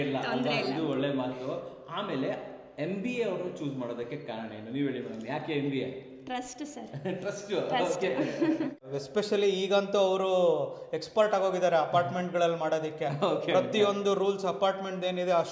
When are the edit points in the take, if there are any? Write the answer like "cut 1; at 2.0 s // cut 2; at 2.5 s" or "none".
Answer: cut 1; at 9.0 s

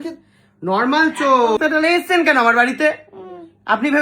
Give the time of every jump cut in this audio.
cut 1; at 1.6 s

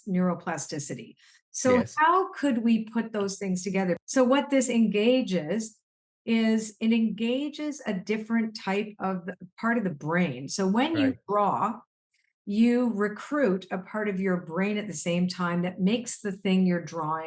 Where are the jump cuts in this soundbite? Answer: cut 1; at 4.0 s

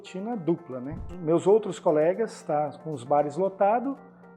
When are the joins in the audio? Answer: cut 1; at 1.0 s

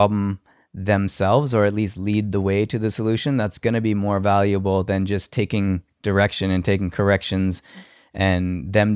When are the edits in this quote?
none

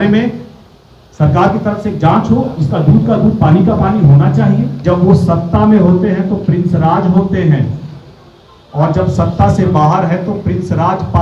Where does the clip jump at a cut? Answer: cut 1; at 4.8 s

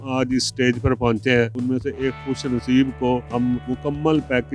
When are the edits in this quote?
cut 1; at 1.6 s // cut 2; at 3.4 s

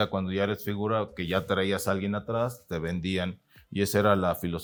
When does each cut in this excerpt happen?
none

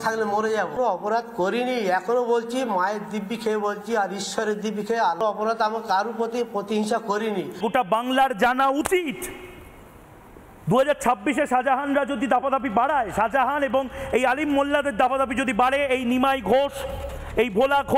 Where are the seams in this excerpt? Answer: cut 1; at 0.8 s // cut 2; at 5.2 s // cut 3; at 7.6 s

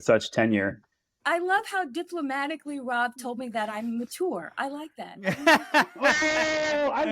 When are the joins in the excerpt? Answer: cut 1; at 1.2 s

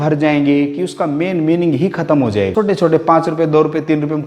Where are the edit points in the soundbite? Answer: cut 1; at 2.5 s

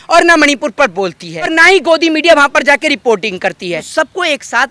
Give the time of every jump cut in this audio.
cut 1; at 1.5 s // cut 2; at 3.9 s

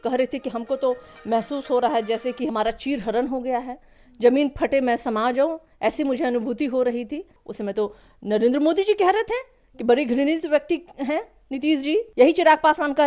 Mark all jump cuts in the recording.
cut 1; at 2.5 s // cut 2; at 7.4 s // cut 3; at 12.1 s

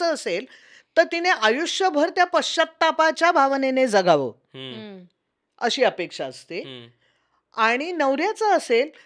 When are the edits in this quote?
none

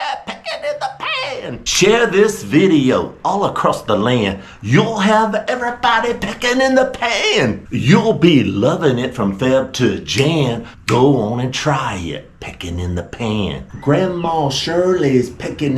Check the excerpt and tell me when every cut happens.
cut 1; at 1.6 s

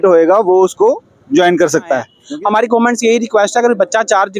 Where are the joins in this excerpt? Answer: cut 1; at 2.1 s

